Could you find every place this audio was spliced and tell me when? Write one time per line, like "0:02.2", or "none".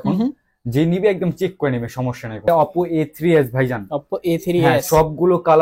0:02.5